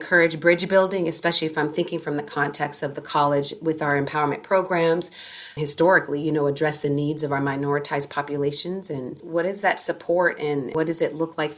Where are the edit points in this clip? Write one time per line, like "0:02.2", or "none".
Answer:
0:10.7